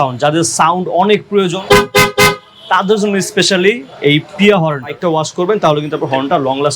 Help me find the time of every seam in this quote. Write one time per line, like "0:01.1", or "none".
0:01.6
0:04.9